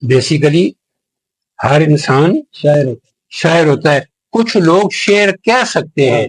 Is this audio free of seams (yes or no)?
yes